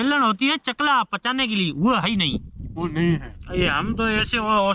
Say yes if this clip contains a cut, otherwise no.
no